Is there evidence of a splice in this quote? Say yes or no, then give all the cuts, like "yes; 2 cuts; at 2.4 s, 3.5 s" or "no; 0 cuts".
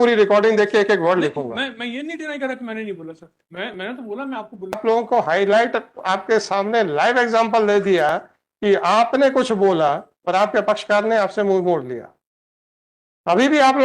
yes; 1 cut; at 4.8 s